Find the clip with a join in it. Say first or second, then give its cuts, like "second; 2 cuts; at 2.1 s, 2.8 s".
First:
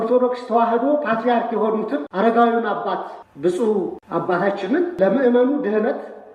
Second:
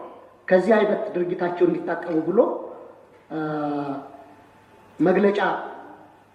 first; 4 cuts; at 2.1 s, 3.2 s, 4.0 s, 5.0 s